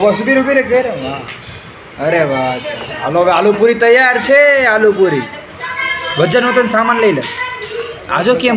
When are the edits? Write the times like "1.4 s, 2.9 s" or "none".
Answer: none